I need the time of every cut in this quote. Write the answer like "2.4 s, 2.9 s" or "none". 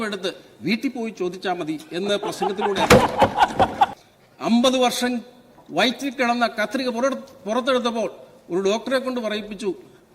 3.9 s